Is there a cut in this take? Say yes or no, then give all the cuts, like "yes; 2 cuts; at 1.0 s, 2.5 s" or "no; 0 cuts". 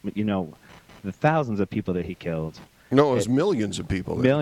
no; 0 cuts